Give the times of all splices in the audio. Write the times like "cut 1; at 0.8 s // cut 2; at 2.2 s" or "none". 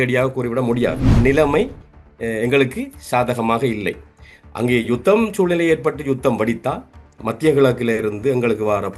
cut 1; at 1.1 s